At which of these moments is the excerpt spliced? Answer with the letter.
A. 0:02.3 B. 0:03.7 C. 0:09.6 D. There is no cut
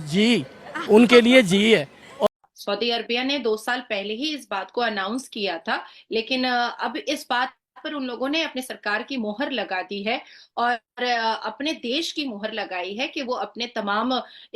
A